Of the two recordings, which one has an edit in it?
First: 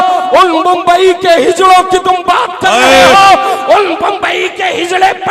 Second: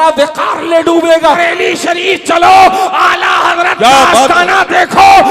second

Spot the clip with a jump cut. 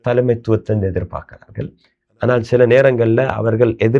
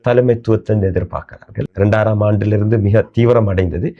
second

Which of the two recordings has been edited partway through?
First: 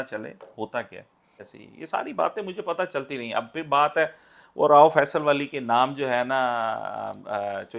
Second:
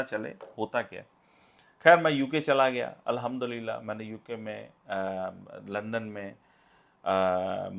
first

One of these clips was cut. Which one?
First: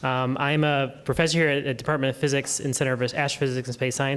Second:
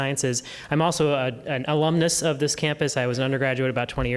first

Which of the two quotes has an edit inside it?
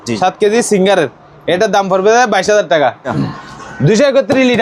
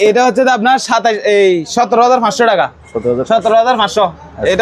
first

